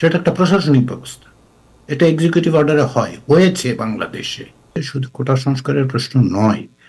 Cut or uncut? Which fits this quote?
cut